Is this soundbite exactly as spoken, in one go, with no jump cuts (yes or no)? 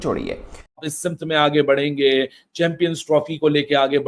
no